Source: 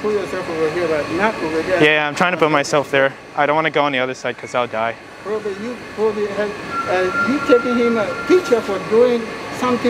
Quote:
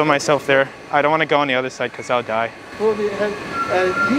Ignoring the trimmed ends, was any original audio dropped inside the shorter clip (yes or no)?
yes